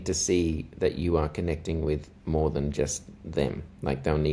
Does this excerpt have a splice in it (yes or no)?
yes